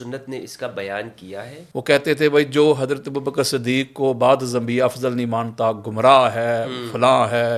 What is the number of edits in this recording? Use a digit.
1